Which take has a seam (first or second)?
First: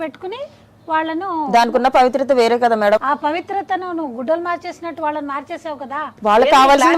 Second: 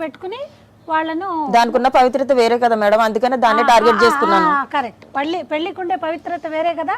first